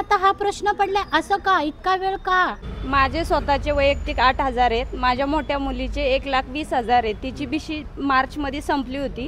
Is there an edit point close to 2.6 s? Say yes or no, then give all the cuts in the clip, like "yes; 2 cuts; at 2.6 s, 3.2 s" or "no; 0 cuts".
yes; 1 cut; at 2.6 s